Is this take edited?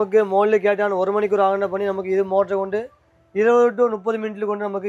no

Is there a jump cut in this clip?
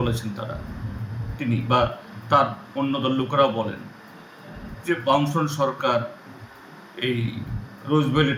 no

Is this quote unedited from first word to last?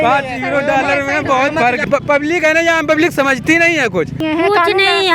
no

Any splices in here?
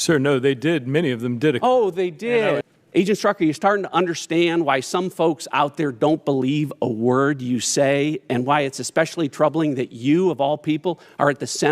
yes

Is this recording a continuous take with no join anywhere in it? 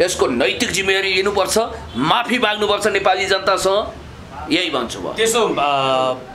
yes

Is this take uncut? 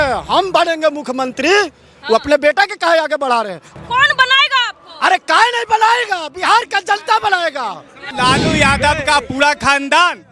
no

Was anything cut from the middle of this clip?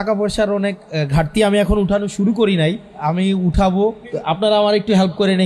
yes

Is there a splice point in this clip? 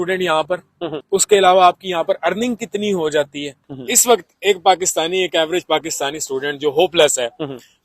yes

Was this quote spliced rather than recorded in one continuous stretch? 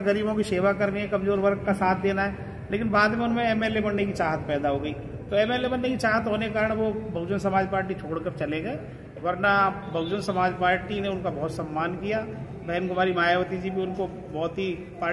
no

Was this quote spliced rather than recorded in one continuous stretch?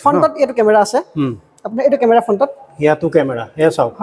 no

